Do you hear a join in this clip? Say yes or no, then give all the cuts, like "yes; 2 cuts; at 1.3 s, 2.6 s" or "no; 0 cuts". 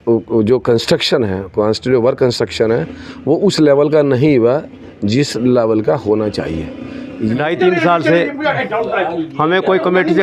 yes; 1 cut; at 7.3 s